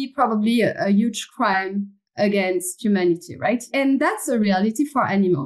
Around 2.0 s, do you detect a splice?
no; 1 cut; at 3.7 s

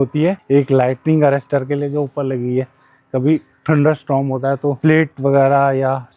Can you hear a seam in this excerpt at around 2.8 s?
no; 0 cuts

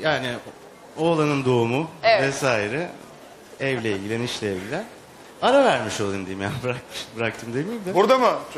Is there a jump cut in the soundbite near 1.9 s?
yes; 1 cut; at 1.9 s

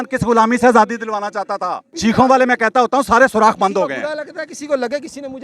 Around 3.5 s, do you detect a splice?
no; 1 cut; at 1.9 s

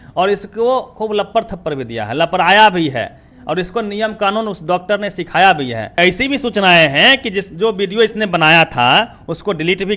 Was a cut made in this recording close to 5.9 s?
yes; 1 cut; at 5.9 s

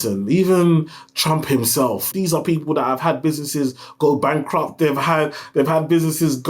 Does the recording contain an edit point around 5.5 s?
no; 1 cut; at 2.1 s

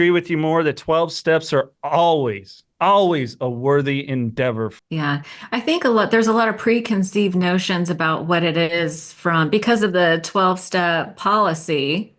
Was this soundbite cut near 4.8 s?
yes; 1 cut; at 4.8 s

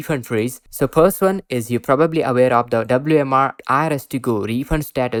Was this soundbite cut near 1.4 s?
no; 0 cuts

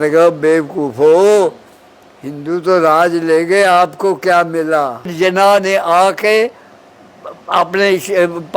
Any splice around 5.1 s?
yes; 1 cut; at 5.1 s

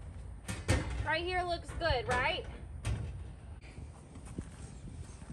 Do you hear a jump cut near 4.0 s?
yes; 1 cut; at 4.0 s

